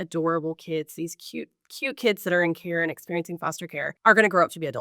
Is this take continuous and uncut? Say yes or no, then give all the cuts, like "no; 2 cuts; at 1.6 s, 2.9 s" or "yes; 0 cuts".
no; 1 cut; at 3.9 s